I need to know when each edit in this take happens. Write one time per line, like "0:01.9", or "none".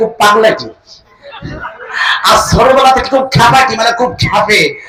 none